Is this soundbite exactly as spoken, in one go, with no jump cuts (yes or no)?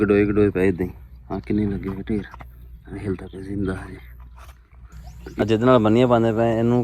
no